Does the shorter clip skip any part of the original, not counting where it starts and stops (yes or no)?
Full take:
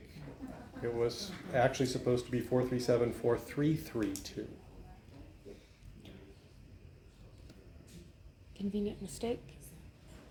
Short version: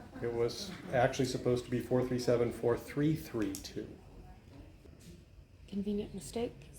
yes